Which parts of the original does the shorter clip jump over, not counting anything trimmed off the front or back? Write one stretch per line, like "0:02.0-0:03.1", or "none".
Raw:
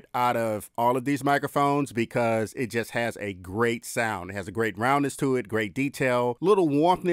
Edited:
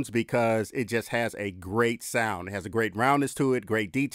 none